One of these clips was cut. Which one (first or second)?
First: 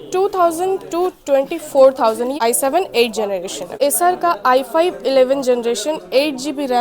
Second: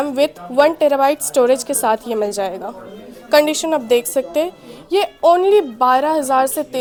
first